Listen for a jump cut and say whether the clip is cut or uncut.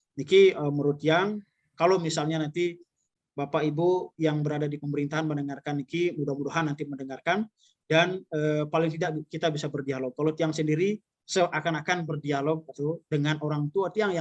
uncut